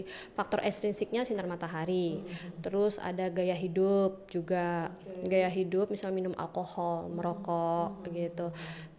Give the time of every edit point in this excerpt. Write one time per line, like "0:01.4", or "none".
none

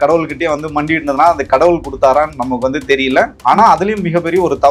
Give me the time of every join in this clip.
none

